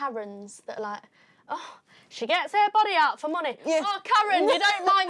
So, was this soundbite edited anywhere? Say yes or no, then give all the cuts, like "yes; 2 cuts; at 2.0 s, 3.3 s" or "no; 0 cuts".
no; 0 cuts